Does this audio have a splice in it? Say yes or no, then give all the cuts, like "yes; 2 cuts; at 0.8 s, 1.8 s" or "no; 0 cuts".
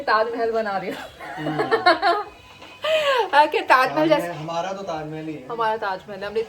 no; 0 cuts